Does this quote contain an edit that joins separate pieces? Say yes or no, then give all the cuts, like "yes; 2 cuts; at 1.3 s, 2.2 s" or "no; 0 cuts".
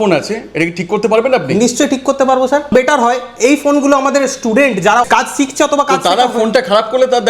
yes; 2 cuts; at 2.7 s, 5.0 s